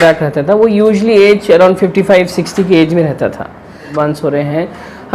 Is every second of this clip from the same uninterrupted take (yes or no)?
no